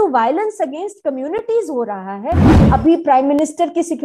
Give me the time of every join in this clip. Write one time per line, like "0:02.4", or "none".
0:02.5